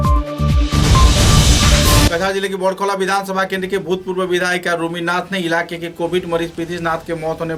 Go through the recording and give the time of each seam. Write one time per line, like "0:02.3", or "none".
none